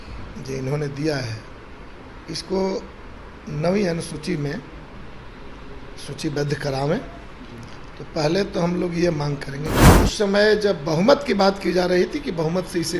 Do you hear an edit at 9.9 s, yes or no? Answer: yes